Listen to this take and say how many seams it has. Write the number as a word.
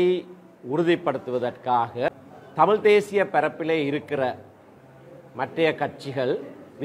one